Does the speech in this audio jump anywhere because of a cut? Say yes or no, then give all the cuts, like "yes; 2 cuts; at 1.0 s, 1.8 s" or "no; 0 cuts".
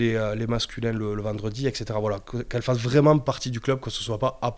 no; 0 cuts